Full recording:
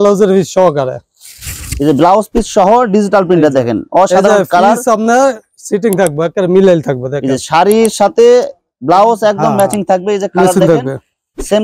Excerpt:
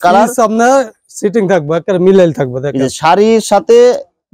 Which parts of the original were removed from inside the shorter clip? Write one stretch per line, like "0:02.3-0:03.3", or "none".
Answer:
none